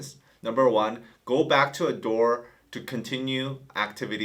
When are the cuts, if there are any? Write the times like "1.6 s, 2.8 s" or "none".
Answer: none

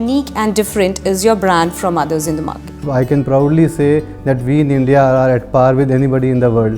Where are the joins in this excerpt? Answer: 2.9 s

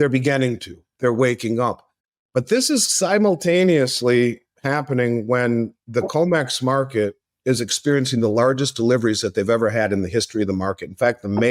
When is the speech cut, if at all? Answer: none

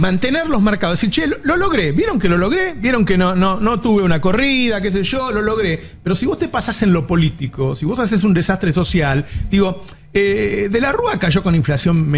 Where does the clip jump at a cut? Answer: none

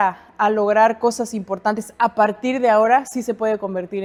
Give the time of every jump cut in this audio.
none

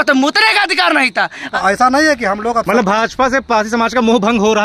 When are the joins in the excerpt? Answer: 1.4 s

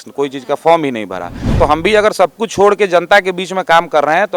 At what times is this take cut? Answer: 1.6 s

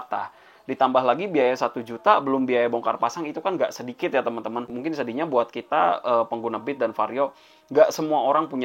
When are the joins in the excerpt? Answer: 4.7 s

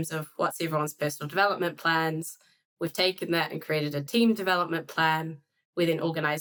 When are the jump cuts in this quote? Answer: none

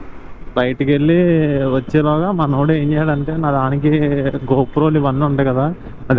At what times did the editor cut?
none

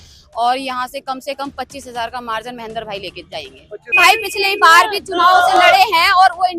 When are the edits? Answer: 4.0 s

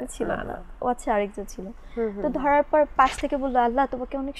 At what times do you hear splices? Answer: none

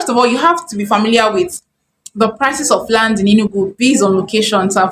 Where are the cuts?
none

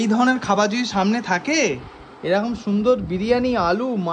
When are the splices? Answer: none

